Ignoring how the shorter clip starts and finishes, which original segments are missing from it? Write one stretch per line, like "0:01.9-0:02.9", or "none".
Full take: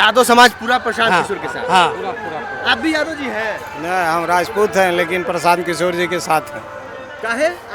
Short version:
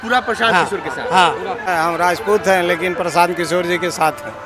0:02.2-0:04.0